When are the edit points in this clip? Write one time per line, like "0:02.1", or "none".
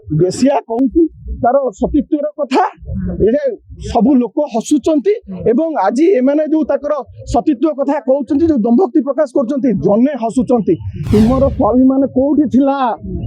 0:10.9

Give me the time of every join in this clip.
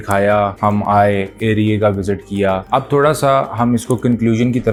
none

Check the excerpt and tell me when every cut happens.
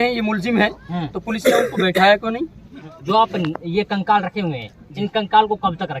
0:02.9

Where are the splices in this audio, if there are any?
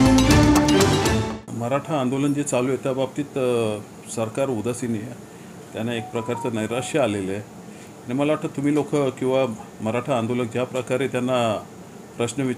0:01.3

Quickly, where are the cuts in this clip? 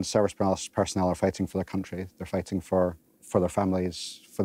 0:03.1

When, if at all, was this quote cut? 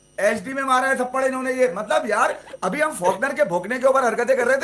none

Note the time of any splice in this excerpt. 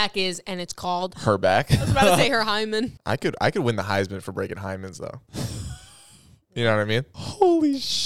0:03.0
0:07.1

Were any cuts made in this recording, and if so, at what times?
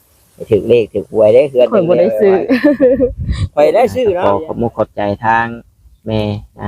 0:04.2

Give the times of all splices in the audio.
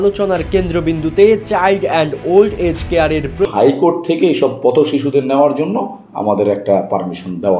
0:03.4

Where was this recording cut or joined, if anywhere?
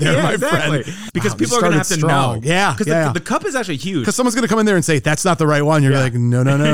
0:01.0

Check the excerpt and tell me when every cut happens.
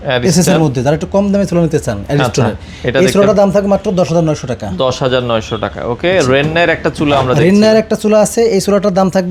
none

